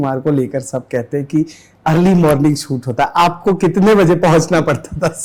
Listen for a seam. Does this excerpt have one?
no; 0 cuts

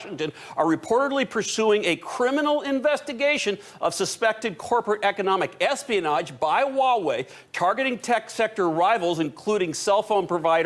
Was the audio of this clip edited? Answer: no; 0 cuts

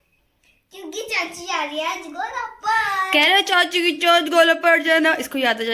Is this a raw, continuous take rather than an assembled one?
yes; 0 cuts

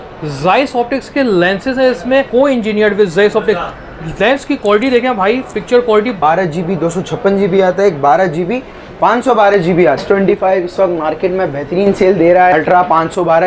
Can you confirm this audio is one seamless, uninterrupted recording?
no; 4 cuts; at 2.3 s, 6.2 s, 10.0 s, 12.5 s

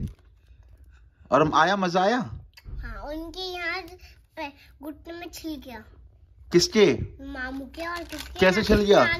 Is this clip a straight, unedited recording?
yes; 0 cuts

